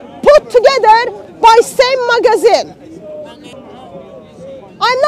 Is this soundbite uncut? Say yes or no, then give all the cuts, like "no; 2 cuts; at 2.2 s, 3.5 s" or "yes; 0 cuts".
no; 1 cut; at 3.5 s